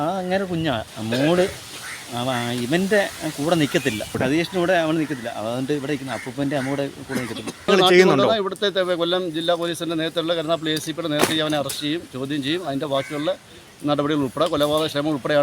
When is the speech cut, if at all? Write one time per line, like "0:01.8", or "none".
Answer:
0:00.9
0:07.7